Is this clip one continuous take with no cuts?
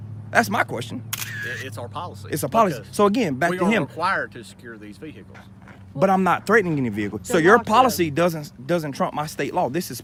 yes; 0 cuts

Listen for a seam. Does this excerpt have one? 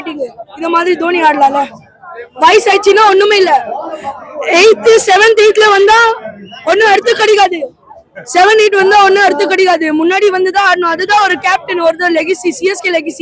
no; 0 cuts

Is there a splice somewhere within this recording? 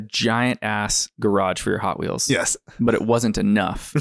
no; 0 cuts

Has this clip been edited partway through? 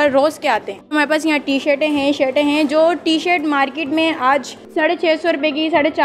yes; 2 cuts; at 0.9 s, 4.6 s

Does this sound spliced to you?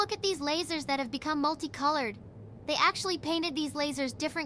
no; 0 cuts

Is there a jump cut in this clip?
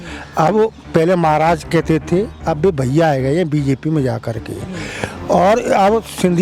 no; 0 cuts

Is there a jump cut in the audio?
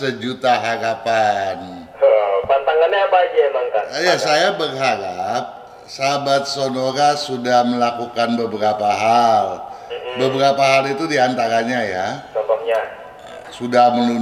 no; 0 cuts

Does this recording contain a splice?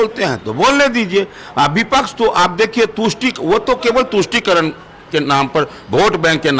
no; 0 cuts

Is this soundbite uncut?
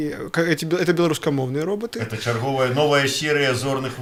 yes; 0 cuts

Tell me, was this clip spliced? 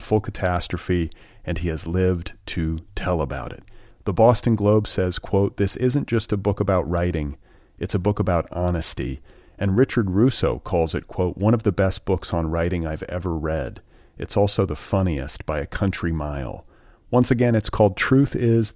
no; 0 cuts

